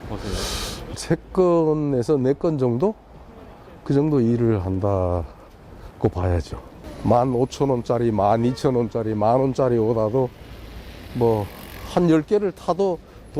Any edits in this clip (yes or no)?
no